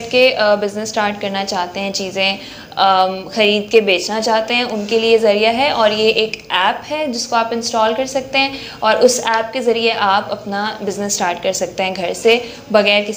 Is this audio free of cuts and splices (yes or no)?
yes